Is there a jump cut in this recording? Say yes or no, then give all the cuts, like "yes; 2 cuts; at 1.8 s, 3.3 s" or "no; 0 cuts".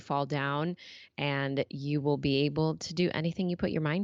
no; 0 cuts